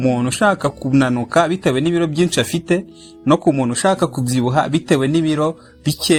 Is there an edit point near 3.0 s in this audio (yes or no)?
no